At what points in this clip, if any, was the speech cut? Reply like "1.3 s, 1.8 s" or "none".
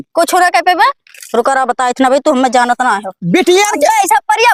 none